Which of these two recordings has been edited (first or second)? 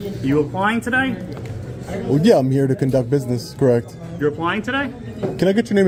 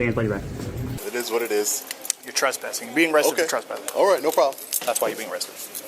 second